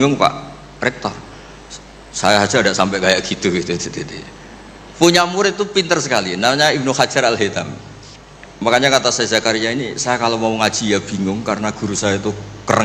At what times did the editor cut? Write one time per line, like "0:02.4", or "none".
none